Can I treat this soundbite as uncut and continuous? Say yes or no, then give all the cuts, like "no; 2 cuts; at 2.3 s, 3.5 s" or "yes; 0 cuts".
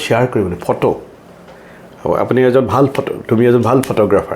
yes; 0 cuts